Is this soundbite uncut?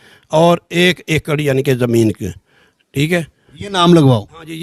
yes; 0 cuts

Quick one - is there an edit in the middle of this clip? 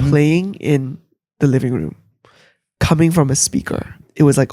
no; 0 cuts

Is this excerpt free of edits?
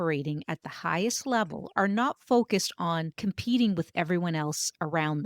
no; 1 cut; at 3.1 s

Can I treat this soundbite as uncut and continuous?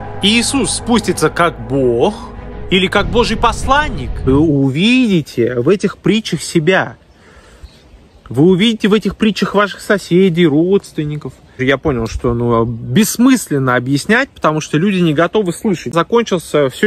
no; 2 cuts; at 4.3 s, 11.6 s

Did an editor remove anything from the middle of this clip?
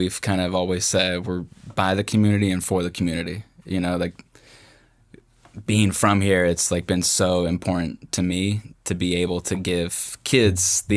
no; 0 cuts

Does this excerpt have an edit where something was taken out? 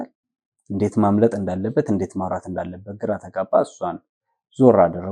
no; 0 cuts

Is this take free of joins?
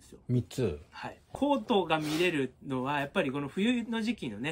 no; 1 cut; at 1.2 s

